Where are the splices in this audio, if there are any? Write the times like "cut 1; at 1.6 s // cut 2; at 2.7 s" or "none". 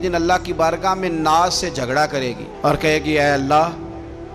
none